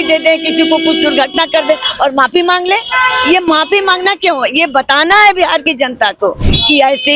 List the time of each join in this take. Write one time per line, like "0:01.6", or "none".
none

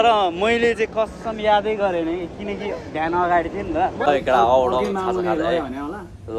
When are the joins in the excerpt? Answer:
0:04.0

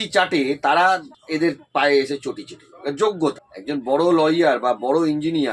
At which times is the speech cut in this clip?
0:01.1
0:03.5

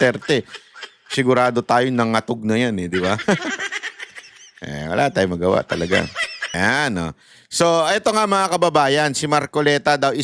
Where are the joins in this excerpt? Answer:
0:06.4

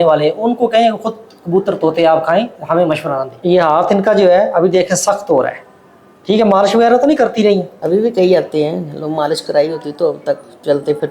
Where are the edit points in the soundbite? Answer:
0:03.3
0:07.7

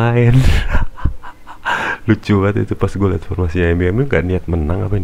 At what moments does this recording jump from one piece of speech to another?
none

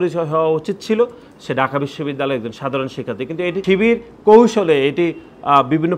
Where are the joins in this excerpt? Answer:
0:03.6

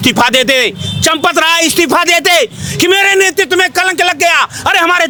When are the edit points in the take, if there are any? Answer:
none

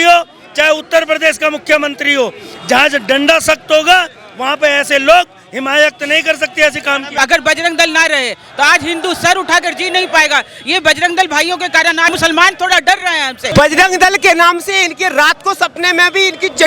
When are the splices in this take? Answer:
0:07.1
0:12.1
0:13.5

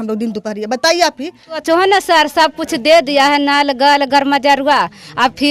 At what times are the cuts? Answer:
0:01.6

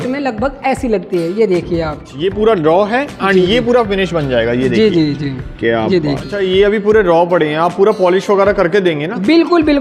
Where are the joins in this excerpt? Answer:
0:02.0
0:06.3

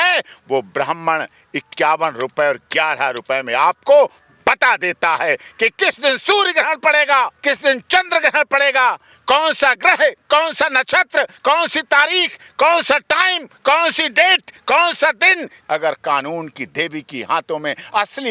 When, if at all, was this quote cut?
0:07.4
0:15.5

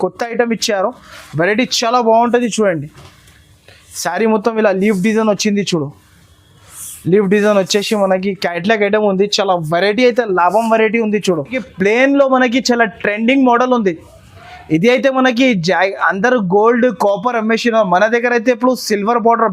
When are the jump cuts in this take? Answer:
0:11.7

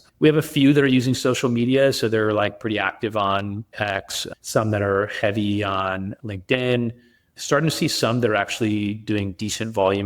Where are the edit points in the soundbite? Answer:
0:03.7

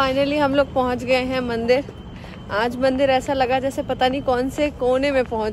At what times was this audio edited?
none

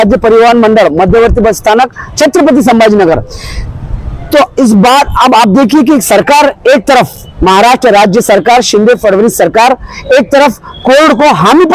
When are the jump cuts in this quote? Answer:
none

